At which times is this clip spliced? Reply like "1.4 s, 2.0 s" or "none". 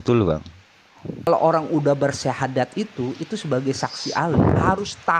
1.3 s